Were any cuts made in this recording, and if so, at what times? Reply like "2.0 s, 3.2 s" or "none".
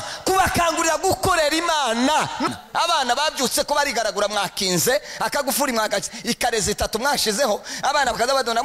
2.5 s